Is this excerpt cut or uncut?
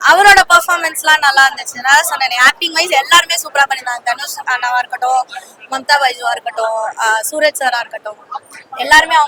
uncut